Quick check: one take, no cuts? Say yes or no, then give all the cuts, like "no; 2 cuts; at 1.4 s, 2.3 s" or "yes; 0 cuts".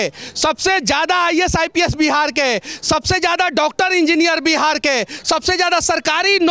yes; 0 cuts